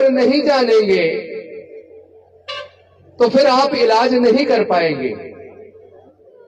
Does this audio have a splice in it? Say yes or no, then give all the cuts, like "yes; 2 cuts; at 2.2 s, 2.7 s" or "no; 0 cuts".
no; 0 cuts